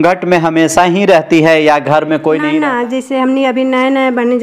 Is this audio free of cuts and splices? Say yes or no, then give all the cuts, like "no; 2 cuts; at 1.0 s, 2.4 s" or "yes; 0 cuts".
no; 1 cut; at 2.5 s